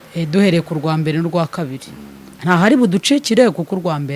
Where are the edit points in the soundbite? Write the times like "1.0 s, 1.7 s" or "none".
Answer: none